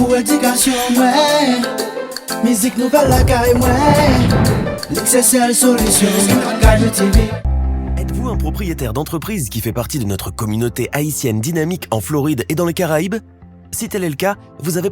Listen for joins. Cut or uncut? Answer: cut